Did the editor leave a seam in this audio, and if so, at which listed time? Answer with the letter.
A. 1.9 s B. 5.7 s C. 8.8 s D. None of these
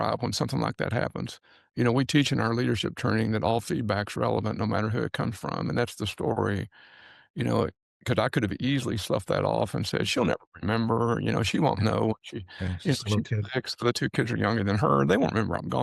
D